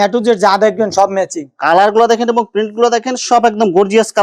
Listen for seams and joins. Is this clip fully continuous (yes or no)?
yes